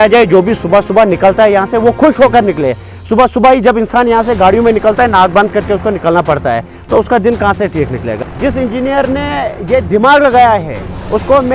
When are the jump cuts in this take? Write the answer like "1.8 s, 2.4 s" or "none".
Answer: 8.1 s